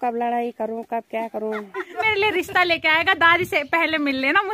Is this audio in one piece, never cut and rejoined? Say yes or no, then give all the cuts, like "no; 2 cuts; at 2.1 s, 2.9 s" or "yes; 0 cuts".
no; 1 cut; at 2.0 s